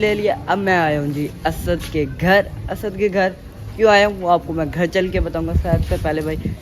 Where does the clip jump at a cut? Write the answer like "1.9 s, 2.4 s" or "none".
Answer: none